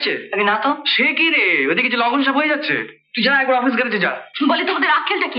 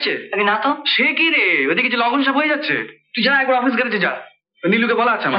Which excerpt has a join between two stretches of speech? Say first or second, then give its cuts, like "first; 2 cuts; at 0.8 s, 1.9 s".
first; 1 cut; at 4.2 s